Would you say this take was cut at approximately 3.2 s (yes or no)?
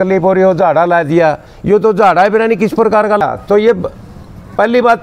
yes